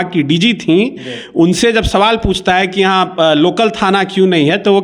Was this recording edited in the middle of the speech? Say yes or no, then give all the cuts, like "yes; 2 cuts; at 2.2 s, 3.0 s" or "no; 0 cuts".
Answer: no; 0 cuts